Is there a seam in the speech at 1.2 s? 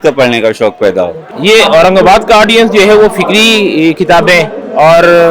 yes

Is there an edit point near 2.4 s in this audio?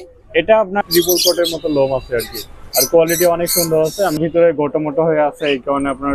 no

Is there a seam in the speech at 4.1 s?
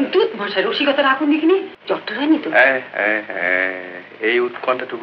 no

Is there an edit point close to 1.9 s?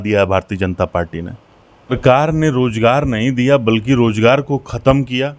yes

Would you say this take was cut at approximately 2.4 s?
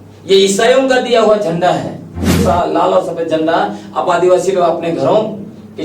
yes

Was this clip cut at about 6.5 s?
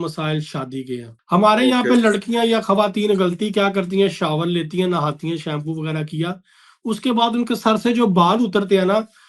no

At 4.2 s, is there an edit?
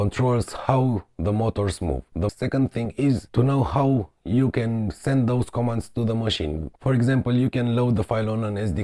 no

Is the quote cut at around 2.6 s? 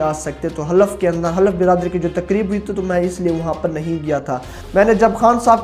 no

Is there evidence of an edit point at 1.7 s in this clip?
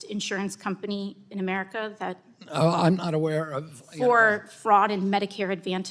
no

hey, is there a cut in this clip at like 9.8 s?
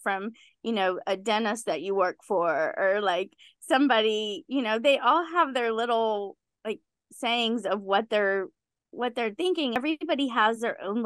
yes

